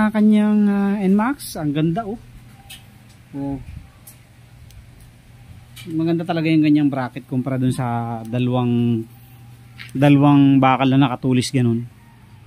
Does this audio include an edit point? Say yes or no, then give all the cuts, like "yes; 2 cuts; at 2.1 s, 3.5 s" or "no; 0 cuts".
no; 0 cuts